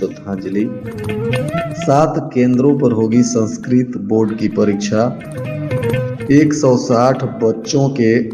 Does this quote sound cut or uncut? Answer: uncut